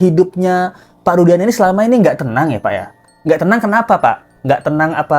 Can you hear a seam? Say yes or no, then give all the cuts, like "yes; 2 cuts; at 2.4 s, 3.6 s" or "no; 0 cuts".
no; 0 cuts